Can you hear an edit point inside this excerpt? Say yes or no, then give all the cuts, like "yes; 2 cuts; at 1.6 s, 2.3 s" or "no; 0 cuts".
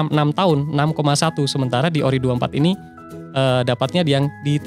no; 0 cuts